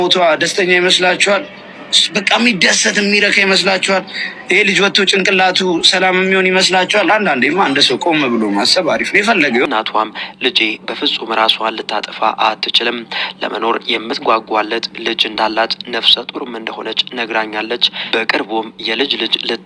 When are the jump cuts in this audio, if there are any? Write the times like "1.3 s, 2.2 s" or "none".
9.7 s